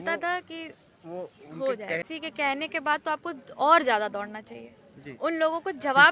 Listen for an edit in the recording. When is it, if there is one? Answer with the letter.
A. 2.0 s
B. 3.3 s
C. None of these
A